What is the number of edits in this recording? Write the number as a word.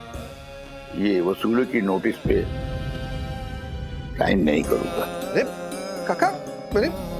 three